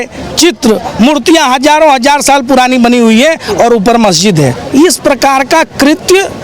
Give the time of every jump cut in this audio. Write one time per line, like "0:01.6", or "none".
0:04.6